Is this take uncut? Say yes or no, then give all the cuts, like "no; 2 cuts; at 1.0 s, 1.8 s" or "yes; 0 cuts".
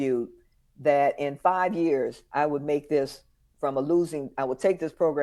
yes; 0 cuts